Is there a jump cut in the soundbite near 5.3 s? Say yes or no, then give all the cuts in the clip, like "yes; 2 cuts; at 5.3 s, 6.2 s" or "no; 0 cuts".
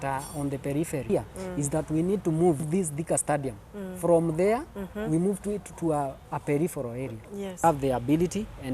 no; 2 cuts; at 1.0 s, 7.6 s